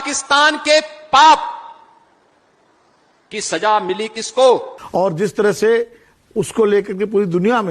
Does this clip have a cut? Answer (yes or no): yes